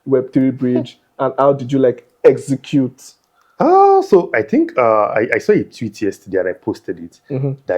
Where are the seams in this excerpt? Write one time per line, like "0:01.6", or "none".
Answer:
none